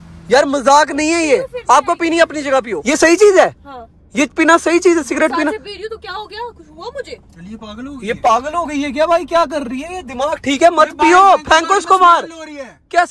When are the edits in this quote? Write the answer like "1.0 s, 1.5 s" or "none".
2.8 s